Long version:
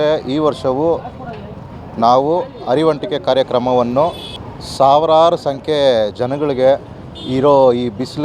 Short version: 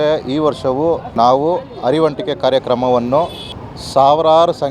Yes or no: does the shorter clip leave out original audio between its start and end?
yes